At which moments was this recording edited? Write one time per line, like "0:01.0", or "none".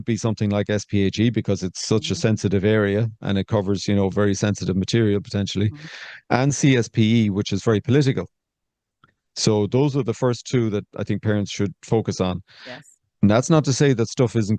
none